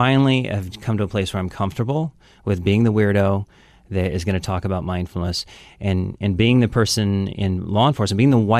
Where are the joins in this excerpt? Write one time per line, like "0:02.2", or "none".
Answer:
none